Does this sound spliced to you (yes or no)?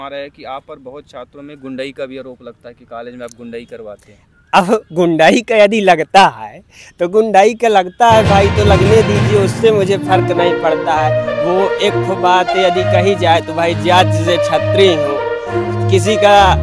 no